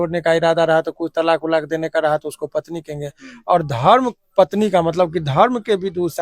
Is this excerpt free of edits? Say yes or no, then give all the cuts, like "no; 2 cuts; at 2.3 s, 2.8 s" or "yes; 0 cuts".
yes; 0 cuts